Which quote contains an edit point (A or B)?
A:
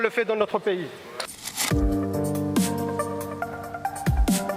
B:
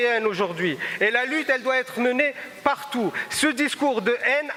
A